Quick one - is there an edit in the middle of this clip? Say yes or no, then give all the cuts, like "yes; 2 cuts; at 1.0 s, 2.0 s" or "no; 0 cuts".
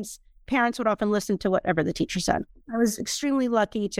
yes; 1 cut; at 2.6 s